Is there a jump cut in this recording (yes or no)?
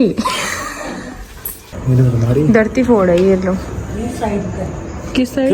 yes